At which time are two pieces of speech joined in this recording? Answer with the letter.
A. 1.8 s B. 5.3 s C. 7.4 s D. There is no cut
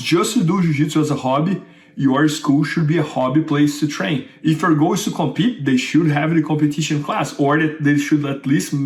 D